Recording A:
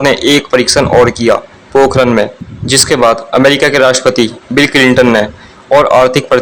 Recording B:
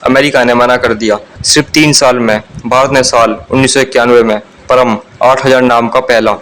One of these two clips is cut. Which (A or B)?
B